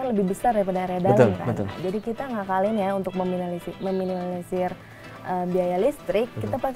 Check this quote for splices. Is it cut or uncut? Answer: uncut